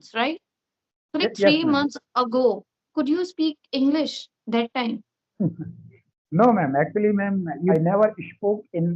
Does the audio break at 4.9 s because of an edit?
no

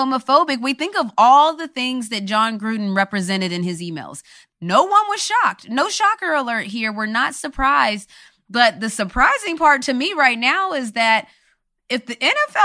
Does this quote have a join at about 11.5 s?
no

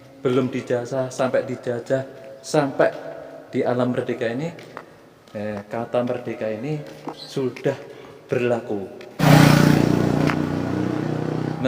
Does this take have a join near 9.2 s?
yes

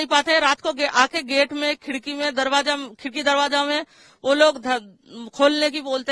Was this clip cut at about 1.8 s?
no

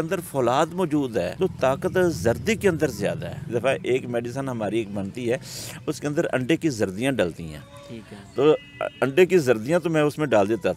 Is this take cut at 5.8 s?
no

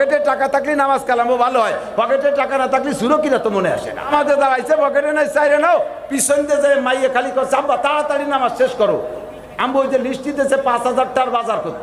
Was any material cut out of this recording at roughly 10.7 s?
no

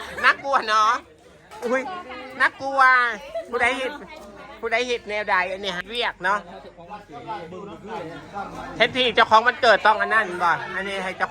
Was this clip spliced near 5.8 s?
yes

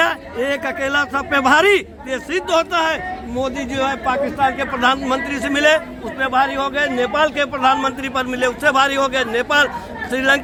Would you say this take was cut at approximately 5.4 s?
no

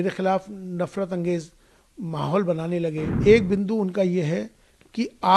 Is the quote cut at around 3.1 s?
yes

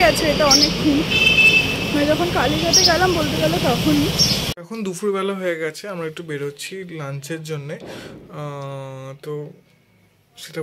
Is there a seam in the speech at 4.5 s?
yes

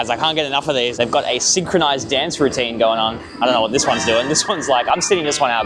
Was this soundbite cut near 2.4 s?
no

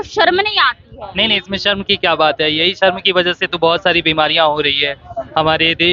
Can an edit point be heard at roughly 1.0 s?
no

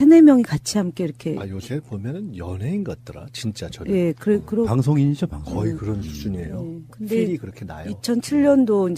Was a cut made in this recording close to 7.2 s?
no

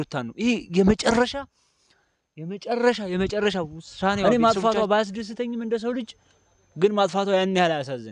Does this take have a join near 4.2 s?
yes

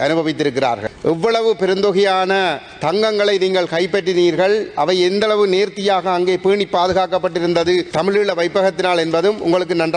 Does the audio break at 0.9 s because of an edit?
yes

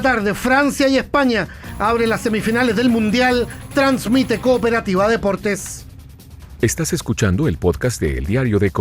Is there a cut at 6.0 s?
yes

